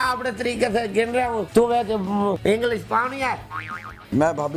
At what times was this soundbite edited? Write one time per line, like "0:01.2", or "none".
0:01.4
0:02.4
0:03.8